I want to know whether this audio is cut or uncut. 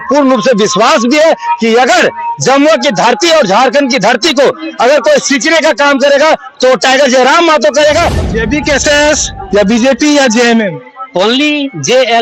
cut